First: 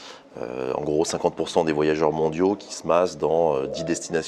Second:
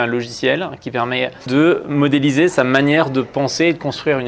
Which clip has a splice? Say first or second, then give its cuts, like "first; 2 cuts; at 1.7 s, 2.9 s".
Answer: second; 1 cut; at 1.5 s